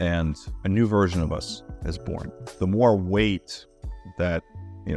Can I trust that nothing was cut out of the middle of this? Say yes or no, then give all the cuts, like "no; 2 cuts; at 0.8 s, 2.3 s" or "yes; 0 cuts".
no; 1 cut; at 2.4 s